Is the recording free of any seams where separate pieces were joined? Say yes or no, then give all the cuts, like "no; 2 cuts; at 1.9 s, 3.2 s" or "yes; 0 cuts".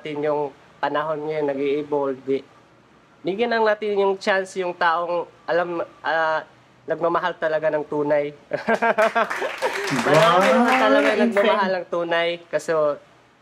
yes; 0 cuts